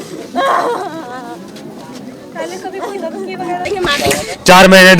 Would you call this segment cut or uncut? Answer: cut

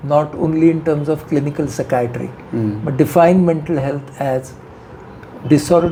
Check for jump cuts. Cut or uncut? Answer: uncut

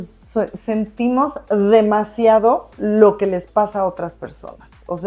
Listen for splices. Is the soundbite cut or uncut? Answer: uncut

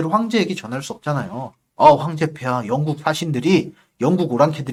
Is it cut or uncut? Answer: uncut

